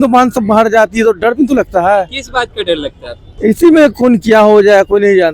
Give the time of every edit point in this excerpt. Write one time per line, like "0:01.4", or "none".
none